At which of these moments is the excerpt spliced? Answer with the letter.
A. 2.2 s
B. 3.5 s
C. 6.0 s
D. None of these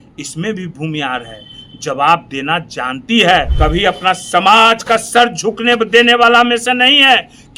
B